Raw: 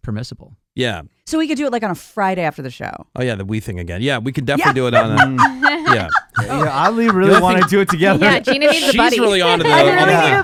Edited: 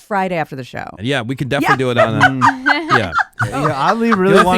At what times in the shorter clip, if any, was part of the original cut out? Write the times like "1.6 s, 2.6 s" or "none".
0.9 s